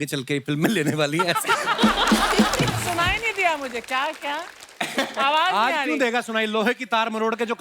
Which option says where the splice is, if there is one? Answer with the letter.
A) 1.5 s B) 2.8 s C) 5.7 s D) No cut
B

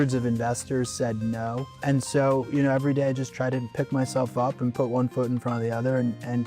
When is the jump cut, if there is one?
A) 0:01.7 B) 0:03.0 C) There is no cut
A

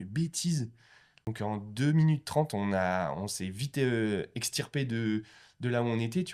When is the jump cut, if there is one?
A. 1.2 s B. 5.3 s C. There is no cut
A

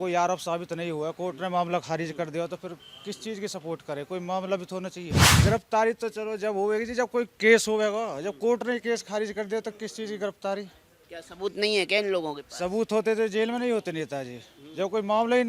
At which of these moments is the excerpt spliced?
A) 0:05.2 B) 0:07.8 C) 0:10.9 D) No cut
A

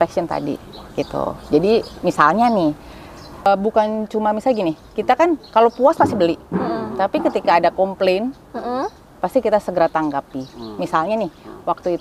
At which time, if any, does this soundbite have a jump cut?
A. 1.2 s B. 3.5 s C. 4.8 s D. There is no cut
B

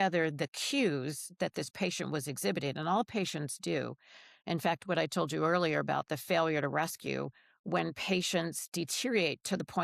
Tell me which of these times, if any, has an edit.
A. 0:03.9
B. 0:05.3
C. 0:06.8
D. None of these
D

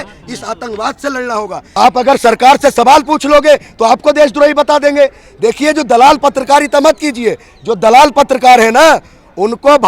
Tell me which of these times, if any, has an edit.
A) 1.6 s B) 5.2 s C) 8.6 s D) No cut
A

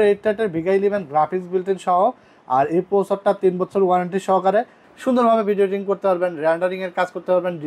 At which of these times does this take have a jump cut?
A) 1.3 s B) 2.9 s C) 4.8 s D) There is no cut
C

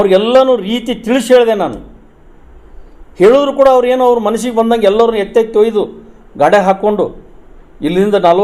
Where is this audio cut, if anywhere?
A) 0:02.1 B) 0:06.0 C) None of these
C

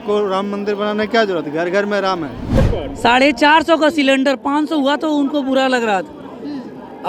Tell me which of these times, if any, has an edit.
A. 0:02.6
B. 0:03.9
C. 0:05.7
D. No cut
A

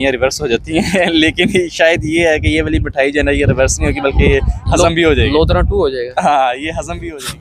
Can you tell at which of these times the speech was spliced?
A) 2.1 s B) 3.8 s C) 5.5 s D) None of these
D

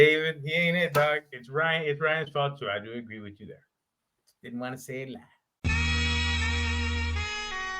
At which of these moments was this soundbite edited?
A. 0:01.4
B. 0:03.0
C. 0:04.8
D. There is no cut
A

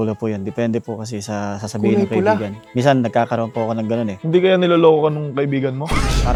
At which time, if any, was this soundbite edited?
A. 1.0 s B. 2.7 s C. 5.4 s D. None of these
D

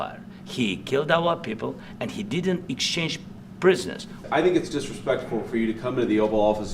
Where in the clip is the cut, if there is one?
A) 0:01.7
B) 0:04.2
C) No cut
B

